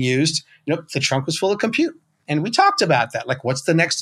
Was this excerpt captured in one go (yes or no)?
yes